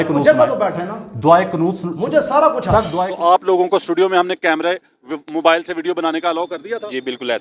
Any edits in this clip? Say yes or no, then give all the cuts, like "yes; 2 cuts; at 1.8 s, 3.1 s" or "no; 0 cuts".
yes; 1 cut; at 2.9 s